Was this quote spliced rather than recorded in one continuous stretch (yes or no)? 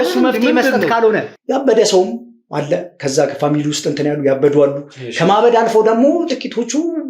yes